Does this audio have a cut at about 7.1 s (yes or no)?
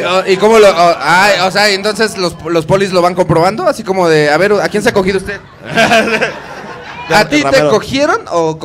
yes